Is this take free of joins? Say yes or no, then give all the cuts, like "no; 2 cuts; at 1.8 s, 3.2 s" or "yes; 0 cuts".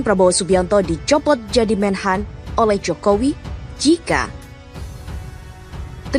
yes; 0 cuts